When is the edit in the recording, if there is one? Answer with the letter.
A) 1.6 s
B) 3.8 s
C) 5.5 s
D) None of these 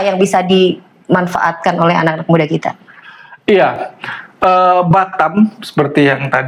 D